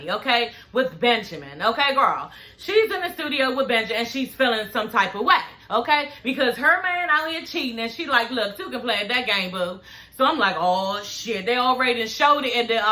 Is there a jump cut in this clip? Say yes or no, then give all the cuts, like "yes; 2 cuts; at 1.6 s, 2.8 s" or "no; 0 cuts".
no; 0 cuts